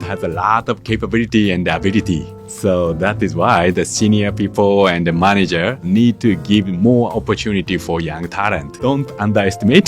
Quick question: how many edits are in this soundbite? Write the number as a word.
three